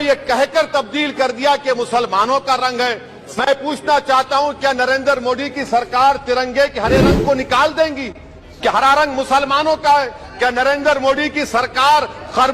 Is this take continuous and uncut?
no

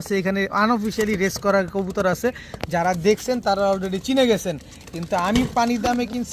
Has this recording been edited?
no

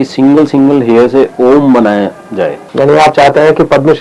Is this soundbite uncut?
no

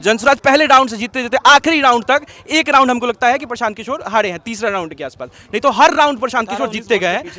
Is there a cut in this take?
no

